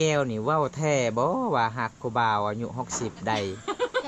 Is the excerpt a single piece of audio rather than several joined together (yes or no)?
yes